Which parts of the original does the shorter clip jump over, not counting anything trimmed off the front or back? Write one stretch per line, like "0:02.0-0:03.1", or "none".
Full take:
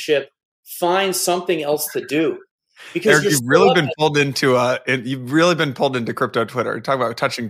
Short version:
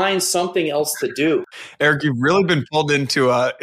0:02.8-0:03.1